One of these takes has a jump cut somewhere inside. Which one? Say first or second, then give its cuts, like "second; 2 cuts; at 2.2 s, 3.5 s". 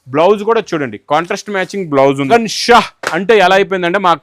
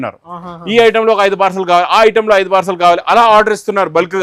first; 1 cut; at 2.3 s